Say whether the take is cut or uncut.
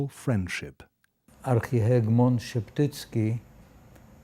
cut